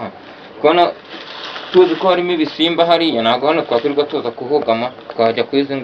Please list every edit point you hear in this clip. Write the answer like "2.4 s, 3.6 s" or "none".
none